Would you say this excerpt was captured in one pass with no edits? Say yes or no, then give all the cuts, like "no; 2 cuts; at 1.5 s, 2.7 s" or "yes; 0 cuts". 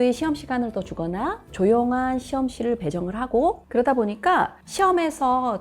no; 1 cut; at 3.6 s